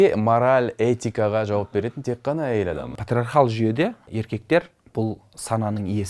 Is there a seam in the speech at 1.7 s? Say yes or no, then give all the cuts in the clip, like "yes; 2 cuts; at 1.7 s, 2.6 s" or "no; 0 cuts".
no; 2 cuts; at 2.9 s, 4.1 s